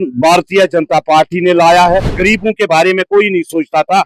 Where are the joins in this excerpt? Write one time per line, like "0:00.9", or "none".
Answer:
0:02.1